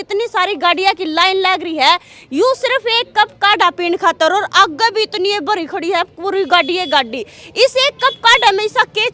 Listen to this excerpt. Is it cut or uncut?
uncut